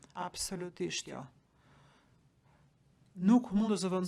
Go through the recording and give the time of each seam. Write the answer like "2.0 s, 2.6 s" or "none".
none

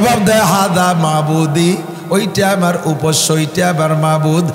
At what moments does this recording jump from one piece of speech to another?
none

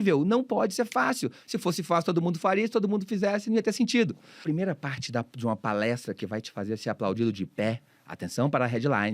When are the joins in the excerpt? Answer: 4.4 s

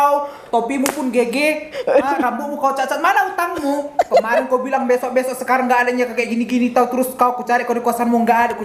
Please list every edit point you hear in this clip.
none

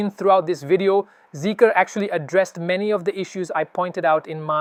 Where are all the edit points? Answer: none

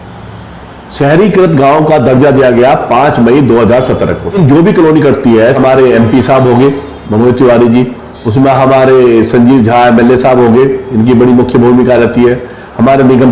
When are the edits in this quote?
4.3 s, 5.6 s

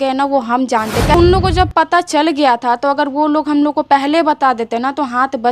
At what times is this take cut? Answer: 1.1 s

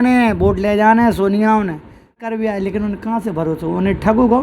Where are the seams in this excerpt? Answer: 2.3 s

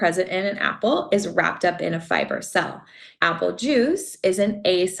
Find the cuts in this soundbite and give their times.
3.1 s

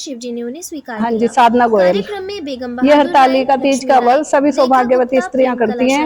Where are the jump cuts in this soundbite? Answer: 1.0 s

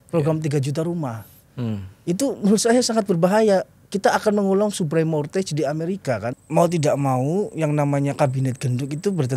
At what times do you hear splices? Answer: 6.4 s

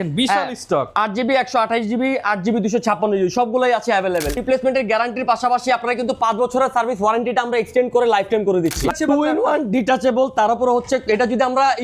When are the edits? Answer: 4.4 s, 8.9 s

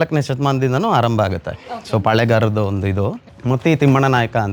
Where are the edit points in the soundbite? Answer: 3.3 s

